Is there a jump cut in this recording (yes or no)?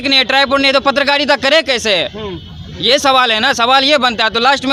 no